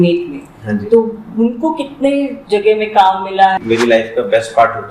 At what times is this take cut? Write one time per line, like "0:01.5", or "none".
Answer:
0:03.6